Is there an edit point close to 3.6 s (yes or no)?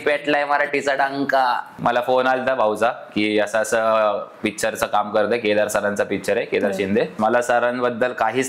no